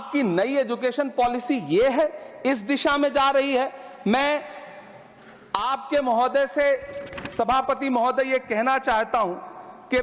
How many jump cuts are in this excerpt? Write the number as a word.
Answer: zero